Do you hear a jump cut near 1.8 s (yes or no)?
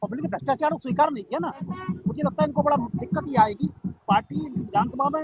yes